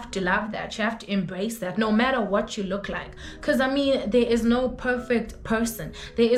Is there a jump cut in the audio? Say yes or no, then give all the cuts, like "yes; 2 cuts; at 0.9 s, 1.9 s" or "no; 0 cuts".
no; 0 cuts